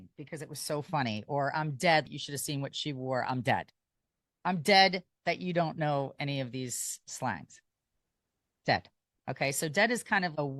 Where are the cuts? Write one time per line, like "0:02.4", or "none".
0:02.1

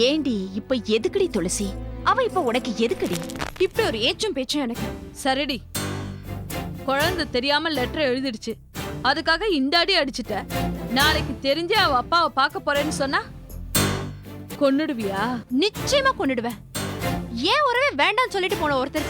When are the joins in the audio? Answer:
0:03.4

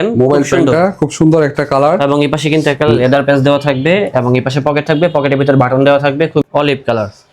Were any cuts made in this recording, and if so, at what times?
0:06.4

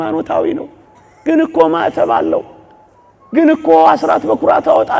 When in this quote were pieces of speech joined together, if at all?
none

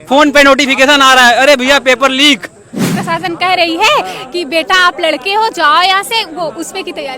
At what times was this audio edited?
0:02.8

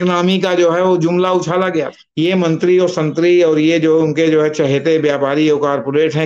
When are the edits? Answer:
0:02.0

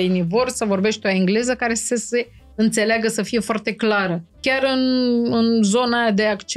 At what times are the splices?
0:04.4

